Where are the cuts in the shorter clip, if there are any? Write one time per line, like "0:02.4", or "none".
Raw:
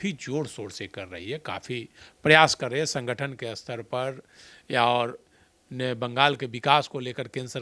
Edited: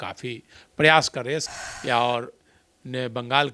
0:01.5